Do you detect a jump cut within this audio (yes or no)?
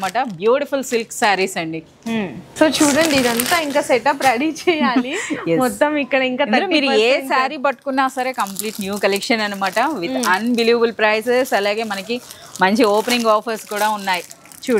no